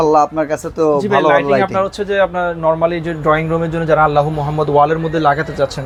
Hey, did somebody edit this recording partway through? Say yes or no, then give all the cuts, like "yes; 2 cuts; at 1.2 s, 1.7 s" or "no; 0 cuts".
no; 0 cuts